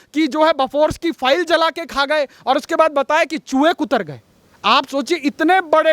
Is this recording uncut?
yes; 0 cuts

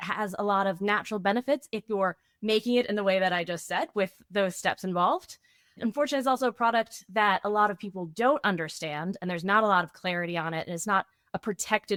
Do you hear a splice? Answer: no; 0 cuts

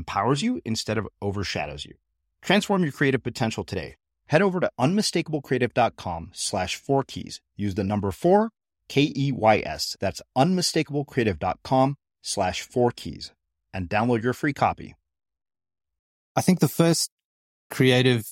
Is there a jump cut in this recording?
yes; 1 cut; at 16.3 s

